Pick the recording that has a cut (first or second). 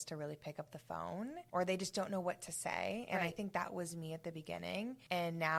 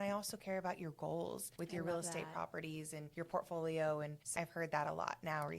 second